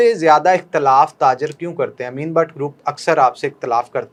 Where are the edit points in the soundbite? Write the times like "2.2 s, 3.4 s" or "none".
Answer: none